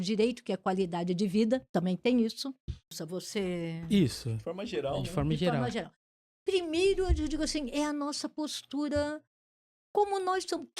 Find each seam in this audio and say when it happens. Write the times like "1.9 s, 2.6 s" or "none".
2.9 s

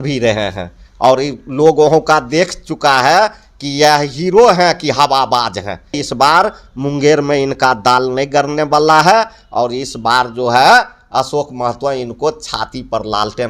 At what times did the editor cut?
6.0 s

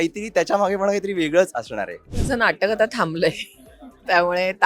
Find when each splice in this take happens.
2.1 s

